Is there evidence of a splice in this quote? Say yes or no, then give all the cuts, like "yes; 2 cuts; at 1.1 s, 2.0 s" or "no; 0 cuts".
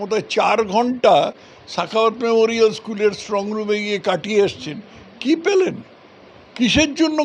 no; 0 cuts